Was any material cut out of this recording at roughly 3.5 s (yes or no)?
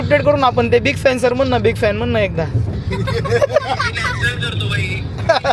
no